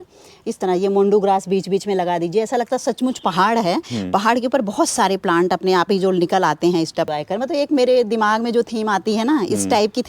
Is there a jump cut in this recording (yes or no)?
yes